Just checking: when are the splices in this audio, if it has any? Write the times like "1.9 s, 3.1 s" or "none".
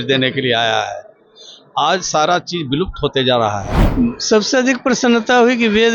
3.8 s